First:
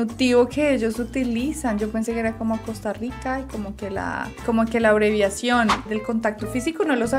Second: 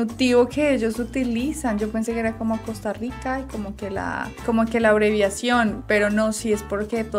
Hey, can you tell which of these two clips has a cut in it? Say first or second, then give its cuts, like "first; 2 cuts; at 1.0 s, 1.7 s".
first; 1 cut; at 5.8 s